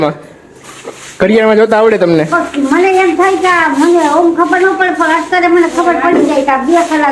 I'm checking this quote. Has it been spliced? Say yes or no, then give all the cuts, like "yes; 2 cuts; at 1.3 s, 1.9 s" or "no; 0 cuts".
no; 0 cuts